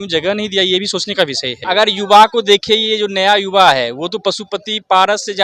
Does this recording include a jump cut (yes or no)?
yes